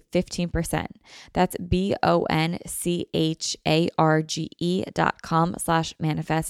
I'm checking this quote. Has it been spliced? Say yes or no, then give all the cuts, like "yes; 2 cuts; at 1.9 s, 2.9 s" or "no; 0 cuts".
no; 0 cuts